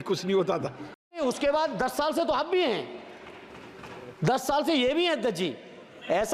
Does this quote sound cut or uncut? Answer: cut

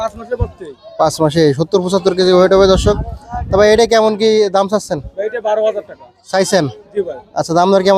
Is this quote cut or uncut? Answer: uncut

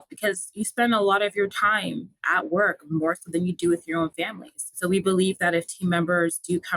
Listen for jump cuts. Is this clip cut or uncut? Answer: cut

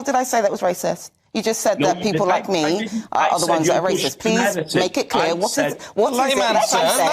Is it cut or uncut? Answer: uncut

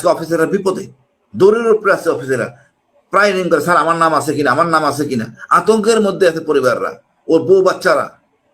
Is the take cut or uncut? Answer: uncut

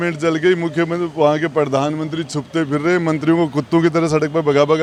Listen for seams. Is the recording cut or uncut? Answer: uncut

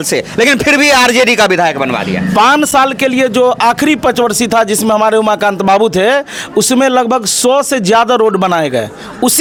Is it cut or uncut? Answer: uncut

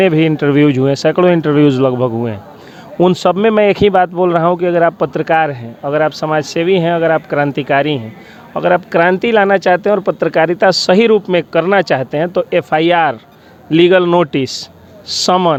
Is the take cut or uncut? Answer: uncut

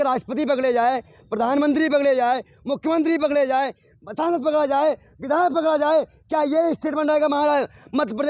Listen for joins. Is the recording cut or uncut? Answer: uncut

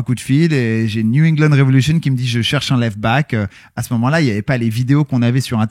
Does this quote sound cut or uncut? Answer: uncut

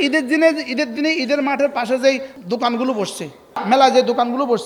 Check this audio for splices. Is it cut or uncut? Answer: cut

